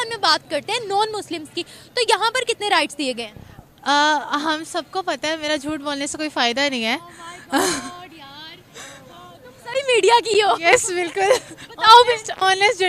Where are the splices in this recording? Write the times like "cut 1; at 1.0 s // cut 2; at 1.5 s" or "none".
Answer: none